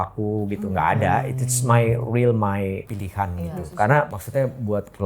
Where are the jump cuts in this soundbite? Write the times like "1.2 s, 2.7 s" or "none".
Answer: 3.0 s, 4.2 s